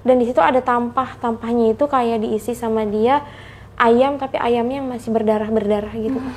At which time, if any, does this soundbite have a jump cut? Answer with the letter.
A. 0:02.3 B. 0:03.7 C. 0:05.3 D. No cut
D